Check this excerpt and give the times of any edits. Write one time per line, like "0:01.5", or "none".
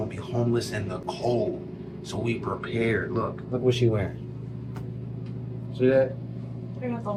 none